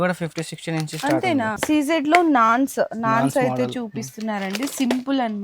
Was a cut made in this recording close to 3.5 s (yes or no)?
no